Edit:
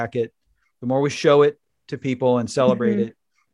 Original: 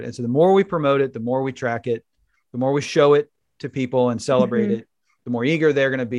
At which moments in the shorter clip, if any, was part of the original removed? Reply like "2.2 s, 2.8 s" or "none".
none

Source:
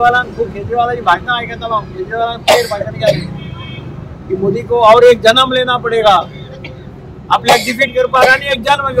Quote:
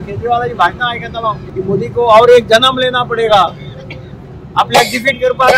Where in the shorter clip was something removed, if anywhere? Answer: 1.4 s

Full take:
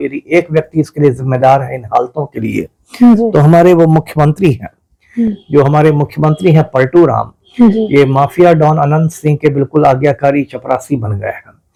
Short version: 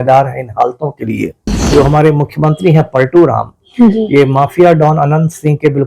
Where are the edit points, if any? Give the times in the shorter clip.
1.6 s

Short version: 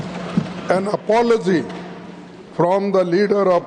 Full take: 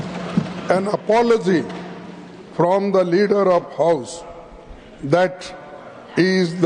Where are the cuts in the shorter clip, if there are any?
none

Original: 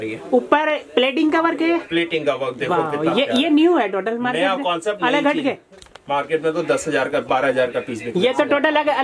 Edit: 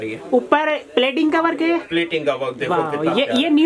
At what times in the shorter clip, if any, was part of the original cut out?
none

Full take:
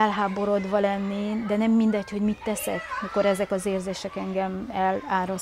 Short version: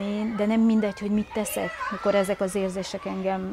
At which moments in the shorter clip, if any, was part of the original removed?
none

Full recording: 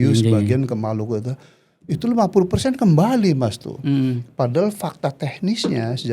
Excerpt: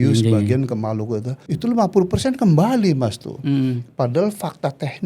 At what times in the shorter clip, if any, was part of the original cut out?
1.4 s

